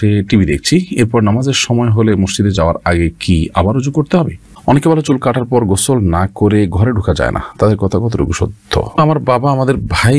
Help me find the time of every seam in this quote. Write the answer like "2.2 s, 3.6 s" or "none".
4.5 s, 9.0 s